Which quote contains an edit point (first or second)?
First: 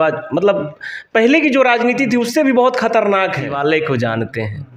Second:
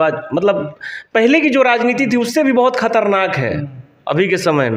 first